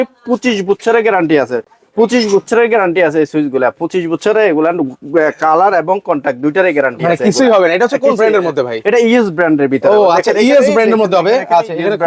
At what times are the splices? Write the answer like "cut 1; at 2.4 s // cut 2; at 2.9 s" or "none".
none